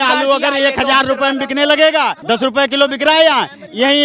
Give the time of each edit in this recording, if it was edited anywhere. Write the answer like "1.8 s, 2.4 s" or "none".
2.2 s